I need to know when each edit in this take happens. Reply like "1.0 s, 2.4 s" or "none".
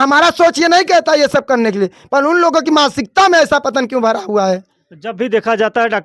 none

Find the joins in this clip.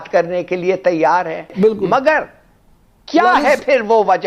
1.5 s

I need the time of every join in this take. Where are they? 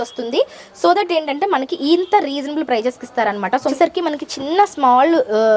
3.7 s

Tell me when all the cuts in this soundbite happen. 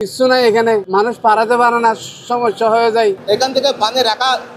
3.2 s

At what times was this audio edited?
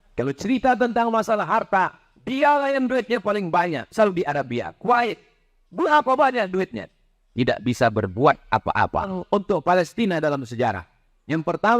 9.2 s

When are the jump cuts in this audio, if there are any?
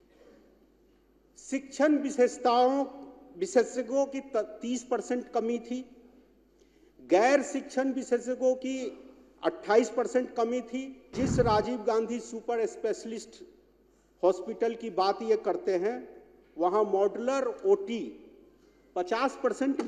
11.1 s

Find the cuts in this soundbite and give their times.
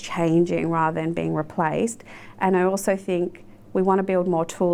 none

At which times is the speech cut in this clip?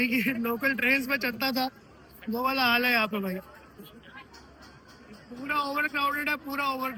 none

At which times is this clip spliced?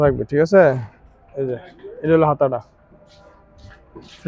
none

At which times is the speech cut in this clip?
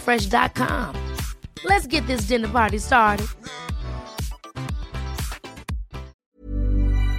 6.2 s

